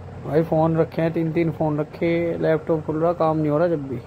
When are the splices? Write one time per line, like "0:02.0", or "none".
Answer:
none